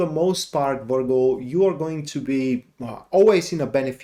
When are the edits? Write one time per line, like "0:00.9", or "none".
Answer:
none